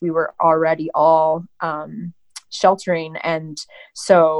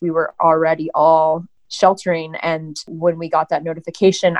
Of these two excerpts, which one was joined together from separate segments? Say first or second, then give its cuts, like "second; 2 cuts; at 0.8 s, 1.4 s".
second; 2 cuts; at 1.6 s, 2.9 s